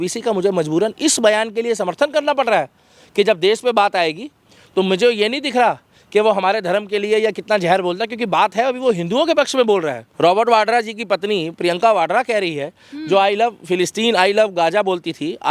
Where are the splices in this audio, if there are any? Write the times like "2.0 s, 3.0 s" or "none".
10.0 s

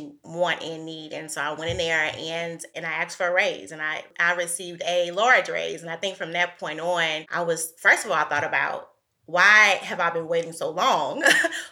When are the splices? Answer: 2.7 s

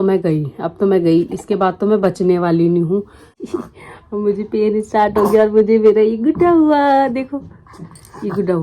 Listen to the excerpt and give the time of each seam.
3.3 s

